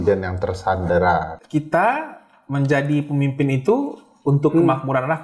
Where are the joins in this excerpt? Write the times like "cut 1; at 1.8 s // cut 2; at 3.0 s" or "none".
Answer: cut 1; at 1.3 s